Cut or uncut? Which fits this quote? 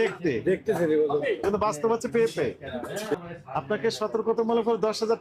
cut